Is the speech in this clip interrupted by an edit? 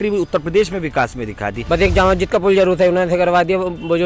yes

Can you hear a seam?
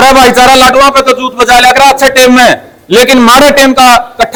no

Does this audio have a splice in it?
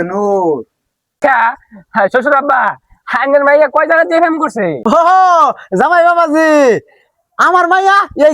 yes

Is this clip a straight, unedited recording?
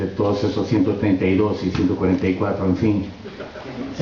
yes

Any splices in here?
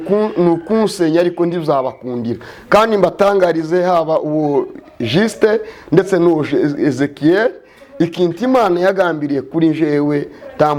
no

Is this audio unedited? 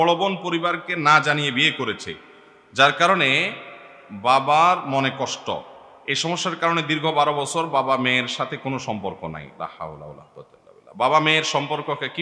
yes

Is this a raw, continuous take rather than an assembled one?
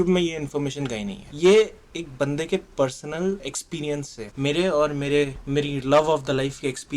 no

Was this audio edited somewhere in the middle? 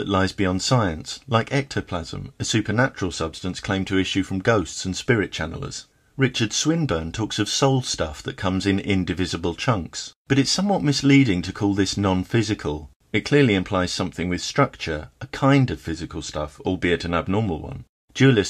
no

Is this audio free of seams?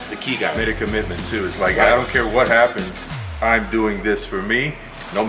yes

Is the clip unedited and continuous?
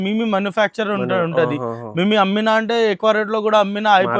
yes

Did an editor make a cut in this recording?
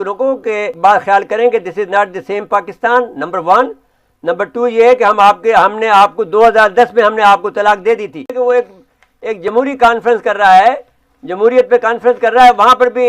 yes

